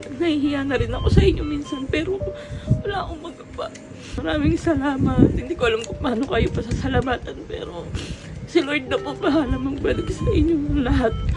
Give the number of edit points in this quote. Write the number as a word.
one